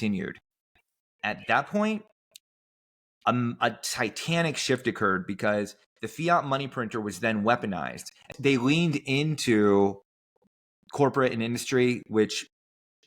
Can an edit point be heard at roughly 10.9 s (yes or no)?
no